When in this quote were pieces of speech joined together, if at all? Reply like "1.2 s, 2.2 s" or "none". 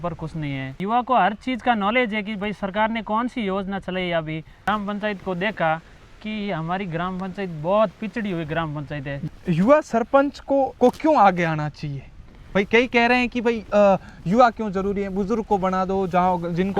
0.8 s, 4.7 s, 9.2 s, 10.7 s